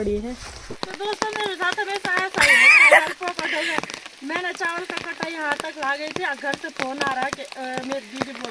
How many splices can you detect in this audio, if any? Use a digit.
1